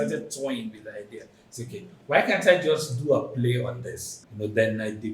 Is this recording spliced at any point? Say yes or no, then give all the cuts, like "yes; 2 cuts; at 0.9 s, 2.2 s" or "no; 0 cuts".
yes; 1 cut; at 4.2 s